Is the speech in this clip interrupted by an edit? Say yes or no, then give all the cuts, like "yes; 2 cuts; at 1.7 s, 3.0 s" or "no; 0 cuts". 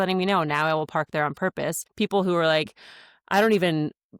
yes; 1 cut; at 1.8 s